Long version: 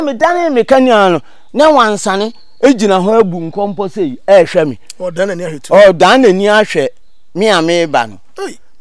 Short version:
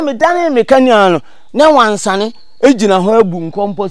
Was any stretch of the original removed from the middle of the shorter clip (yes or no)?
no